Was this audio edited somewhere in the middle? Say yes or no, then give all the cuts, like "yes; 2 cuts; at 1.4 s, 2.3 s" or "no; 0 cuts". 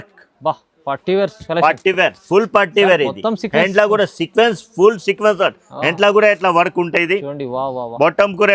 no; 0 cuts